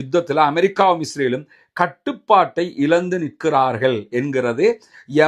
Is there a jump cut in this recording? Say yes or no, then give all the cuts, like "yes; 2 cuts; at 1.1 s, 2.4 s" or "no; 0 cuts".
no; 0 cuts